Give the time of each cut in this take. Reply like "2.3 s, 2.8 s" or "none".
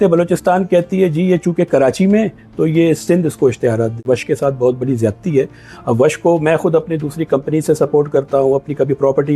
4.0 s